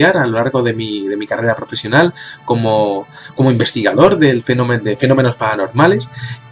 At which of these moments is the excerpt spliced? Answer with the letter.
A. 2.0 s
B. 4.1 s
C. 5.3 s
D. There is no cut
D